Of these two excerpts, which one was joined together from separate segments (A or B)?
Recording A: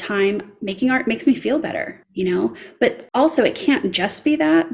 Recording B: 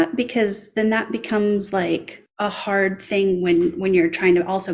A